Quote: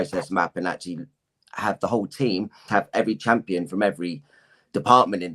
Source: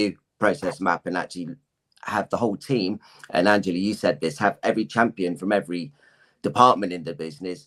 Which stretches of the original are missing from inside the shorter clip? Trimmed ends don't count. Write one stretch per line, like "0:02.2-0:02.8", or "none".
0:03.1-0:04.3